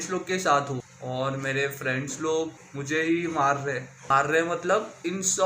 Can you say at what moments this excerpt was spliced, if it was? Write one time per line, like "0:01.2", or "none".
0:00.9
0:02.7
0:04.0

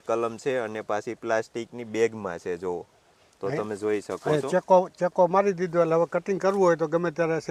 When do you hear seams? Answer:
none

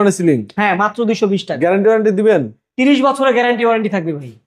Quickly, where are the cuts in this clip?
none

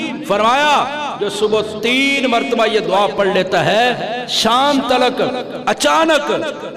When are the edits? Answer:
none

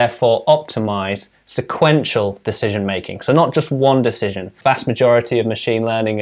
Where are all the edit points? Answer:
0:04.6

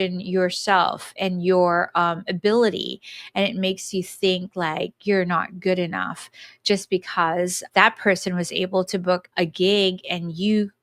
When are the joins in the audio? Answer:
none

